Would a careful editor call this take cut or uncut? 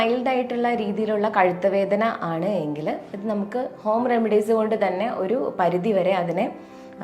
uncut